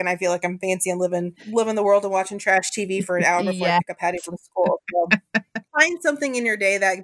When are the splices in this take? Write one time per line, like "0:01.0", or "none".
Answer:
0:01.4
0:05.6